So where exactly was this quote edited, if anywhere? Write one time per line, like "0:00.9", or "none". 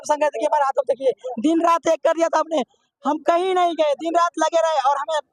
none